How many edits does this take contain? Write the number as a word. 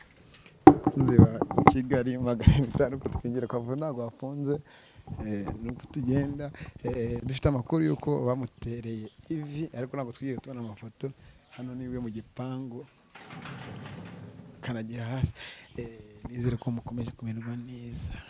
zero